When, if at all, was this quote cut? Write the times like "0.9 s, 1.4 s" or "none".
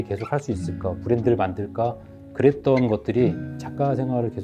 none